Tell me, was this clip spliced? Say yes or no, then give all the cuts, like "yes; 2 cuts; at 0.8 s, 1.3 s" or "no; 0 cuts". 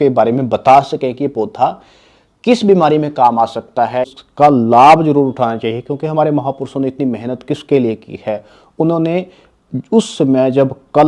yes; 1 cut; at 4.2 s